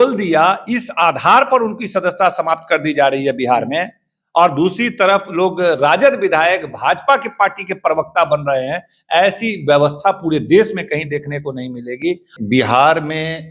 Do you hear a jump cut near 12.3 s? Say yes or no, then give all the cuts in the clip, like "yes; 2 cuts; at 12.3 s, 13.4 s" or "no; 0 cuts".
yes; 1 cut; at 12.3 s